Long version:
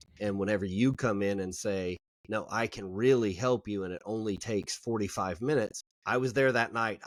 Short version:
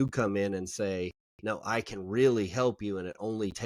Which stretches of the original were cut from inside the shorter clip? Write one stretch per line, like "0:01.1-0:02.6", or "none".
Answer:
none